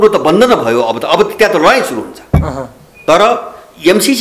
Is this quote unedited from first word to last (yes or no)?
no